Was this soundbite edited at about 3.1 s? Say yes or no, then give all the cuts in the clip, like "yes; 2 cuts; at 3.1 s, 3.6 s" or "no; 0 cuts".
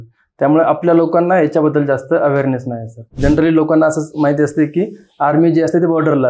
yes; 1 cut; at 3.1 s